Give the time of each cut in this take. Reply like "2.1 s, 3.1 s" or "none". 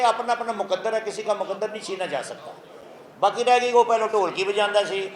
none